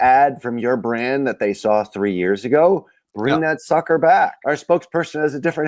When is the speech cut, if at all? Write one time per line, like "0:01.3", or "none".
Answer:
0:04.4